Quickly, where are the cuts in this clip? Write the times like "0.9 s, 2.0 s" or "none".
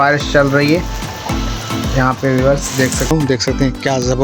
3.1 s